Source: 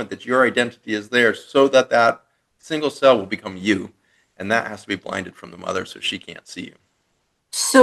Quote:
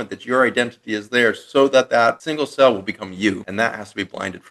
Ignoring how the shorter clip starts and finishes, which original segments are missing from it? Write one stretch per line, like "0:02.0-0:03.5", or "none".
0:02.2-0:02.7
0:03.9-0:04.4